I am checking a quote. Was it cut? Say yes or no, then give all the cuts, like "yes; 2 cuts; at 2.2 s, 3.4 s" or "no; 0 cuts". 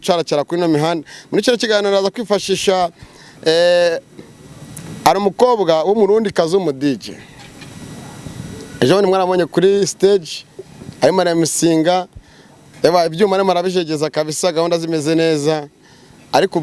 no; 0 cuts